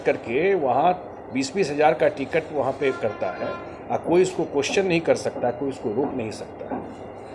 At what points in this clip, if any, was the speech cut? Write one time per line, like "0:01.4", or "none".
none

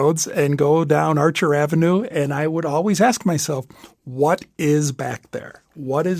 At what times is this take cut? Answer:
none

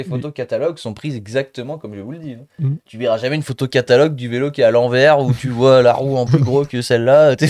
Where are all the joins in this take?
none

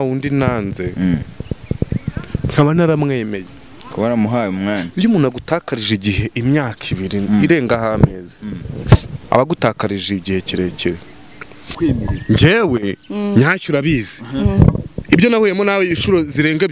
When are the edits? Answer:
0:11.7

